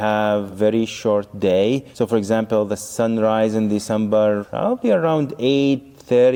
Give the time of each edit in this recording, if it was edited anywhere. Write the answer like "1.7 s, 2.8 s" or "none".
none